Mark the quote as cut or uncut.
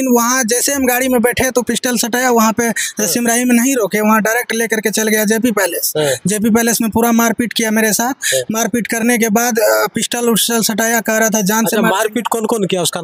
uncut